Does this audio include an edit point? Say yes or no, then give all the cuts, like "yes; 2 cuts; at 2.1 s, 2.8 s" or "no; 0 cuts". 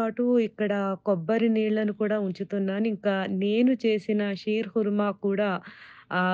no; 0 cuts